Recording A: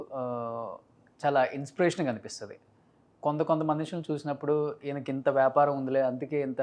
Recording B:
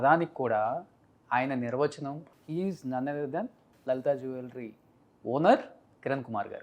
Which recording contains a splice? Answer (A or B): B